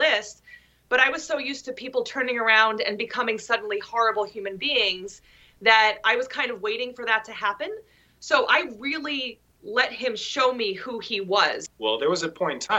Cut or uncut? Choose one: cut